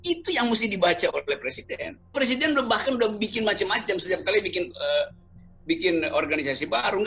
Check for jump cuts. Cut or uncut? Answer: cut